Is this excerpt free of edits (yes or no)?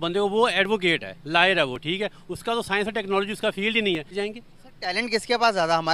no